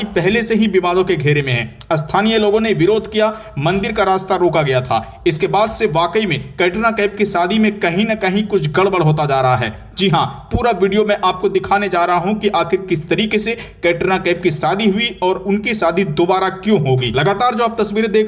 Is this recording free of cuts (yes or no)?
no